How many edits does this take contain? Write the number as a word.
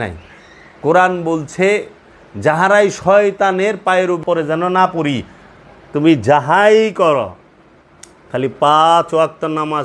one